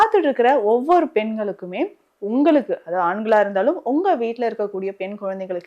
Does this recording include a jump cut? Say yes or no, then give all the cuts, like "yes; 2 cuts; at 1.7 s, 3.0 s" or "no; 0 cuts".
no; 0 cuts